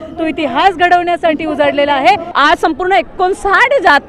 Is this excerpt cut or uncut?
cut